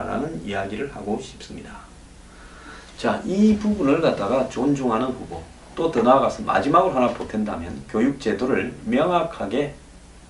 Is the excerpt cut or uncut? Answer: cut